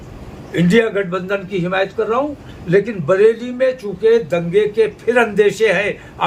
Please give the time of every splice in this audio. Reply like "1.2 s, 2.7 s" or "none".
none